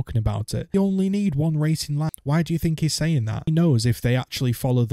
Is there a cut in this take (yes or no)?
yes